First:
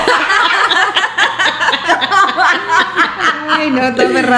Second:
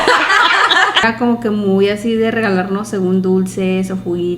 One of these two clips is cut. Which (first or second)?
second